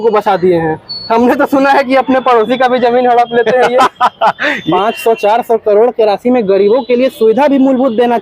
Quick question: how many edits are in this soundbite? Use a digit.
1